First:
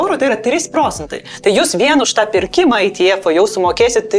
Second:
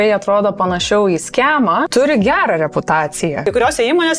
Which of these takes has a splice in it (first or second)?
second